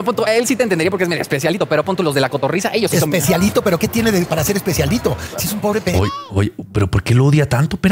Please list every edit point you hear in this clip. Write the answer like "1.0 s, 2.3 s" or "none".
none

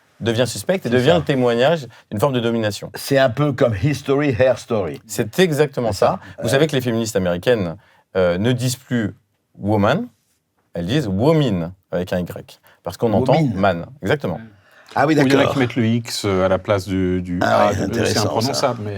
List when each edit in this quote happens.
none

